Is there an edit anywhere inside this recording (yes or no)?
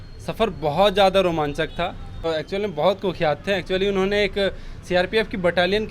yes